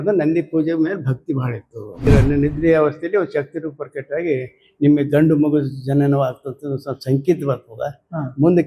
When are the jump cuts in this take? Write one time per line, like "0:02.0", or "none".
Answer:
0:02.0